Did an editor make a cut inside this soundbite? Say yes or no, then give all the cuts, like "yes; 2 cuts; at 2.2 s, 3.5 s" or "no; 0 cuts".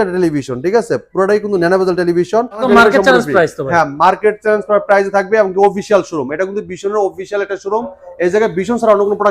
yes; 1 cut; at 2.6 s